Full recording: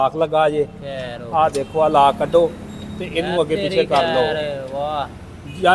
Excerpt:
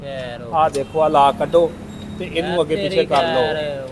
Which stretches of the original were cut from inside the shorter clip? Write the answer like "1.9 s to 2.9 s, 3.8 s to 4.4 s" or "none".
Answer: none